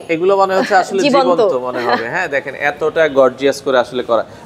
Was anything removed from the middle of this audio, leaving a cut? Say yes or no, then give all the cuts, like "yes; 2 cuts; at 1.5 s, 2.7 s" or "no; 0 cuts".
no; 0 cuts